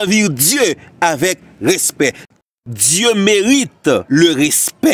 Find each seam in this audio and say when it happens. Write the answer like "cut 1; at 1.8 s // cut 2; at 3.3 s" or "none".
cut 1; at 2.5 s // cut 2; at 4.0 s